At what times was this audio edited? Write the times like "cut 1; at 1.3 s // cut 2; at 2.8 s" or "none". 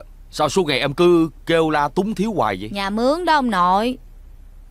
none